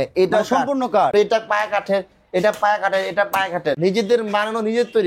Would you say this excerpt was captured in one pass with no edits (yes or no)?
no